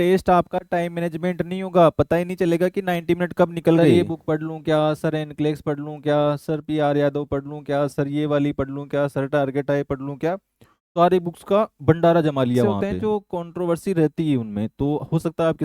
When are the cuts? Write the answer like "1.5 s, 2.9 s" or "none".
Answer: 3.9 s, 12.7 s